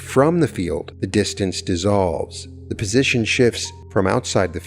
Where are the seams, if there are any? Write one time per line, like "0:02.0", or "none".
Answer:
0:00.9
0:03.7